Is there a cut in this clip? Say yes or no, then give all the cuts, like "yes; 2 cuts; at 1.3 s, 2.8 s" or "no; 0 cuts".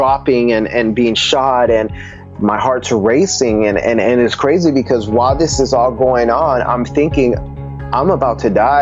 yes; 1 cut; at 2.2 s